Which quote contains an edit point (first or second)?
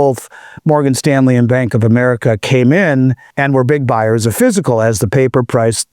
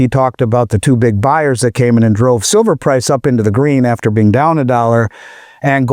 first